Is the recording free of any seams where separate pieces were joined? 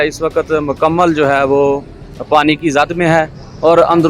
yes; 0 cuts

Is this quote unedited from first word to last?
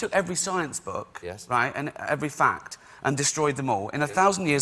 yes; 0 cuts

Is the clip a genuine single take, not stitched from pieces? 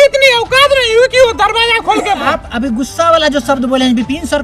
no; 1 cut; at 2.2 s

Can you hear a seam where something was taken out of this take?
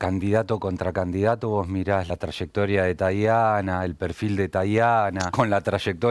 yes; 2 cuts; at 2.1 s, 5.2 s

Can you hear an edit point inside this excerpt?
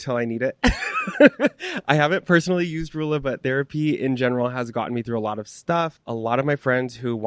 no; 0 cuts

